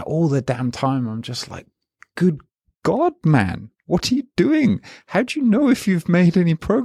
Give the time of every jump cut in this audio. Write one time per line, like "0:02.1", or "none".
none